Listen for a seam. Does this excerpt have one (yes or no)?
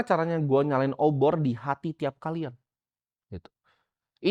no